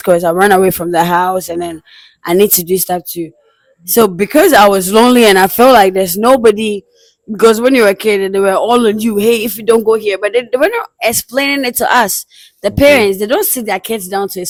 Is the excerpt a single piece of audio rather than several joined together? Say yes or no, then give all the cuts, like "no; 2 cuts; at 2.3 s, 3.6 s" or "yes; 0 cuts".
yes; 0 cuts